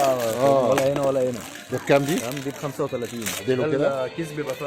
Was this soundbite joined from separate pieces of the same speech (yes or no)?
yes